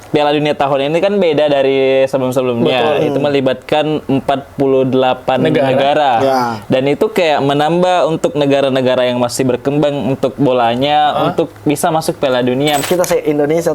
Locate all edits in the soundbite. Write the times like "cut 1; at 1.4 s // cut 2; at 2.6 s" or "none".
cut 1; at 12.8 s